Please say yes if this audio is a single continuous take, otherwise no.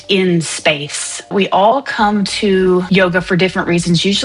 no